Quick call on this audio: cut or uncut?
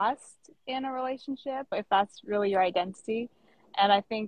cut